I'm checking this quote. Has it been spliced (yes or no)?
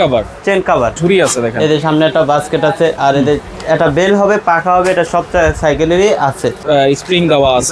yes